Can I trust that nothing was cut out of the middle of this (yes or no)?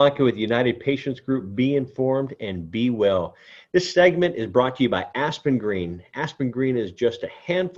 yes